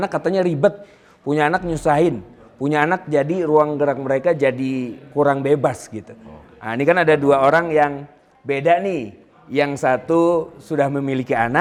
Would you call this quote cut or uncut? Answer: uncut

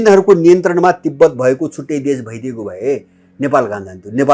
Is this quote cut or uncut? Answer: uncut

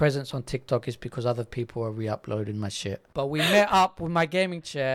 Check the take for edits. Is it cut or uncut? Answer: cut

